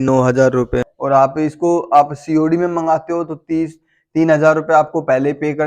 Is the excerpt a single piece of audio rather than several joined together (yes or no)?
no